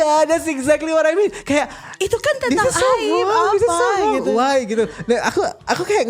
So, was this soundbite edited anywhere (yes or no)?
no